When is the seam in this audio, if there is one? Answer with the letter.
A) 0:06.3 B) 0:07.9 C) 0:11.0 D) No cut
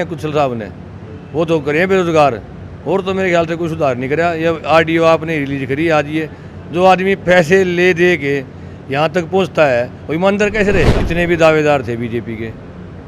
C